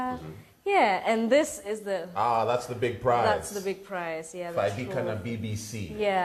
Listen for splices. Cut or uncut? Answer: cut